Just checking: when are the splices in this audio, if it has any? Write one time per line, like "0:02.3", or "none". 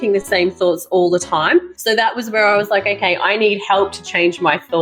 none